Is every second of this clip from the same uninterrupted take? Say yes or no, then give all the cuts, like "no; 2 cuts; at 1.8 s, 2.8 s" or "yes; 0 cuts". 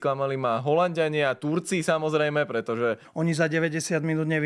no; 1 cut; at 3.1 s